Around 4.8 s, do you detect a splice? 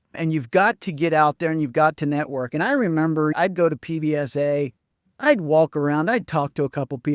no; 1 cut; at 3.3 s

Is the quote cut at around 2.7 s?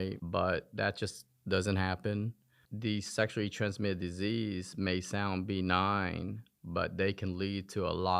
yes; 1 cut; at 2.7 s

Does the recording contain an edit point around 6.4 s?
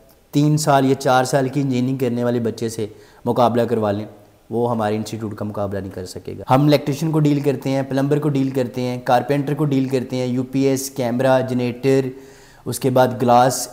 yes; 1 cut; at 6.4 s

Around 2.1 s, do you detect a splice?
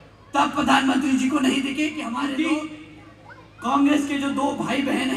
yes; 1 cut; at 2.1 s

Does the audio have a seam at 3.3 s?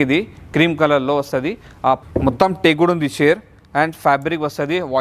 no; 1 cut; at 2.0 s

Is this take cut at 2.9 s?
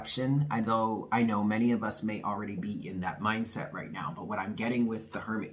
no; 0 cuts

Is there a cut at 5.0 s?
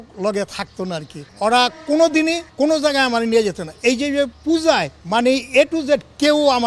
yes; 4 cuts; at 1.2 s, 2.5 s, 4.4 s, 5.0 s

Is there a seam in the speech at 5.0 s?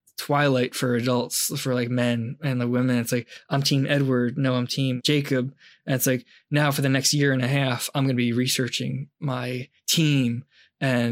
yes; 1 cut; at 5.0 s

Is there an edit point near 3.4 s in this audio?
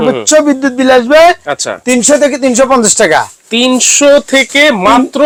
no; 0 cuts

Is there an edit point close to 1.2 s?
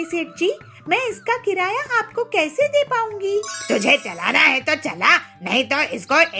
no; 1 cut; at 3.5 s

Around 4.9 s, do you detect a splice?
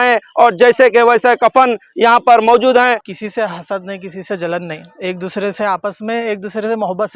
no; 1 cut; at 3.0 s

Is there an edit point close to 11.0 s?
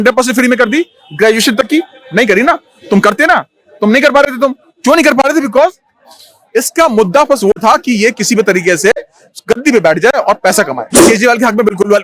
yes; 1 cut; at 11.0 s

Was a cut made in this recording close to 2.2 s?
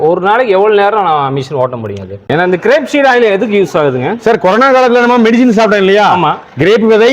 yes; 1 cut; at 2.2 s

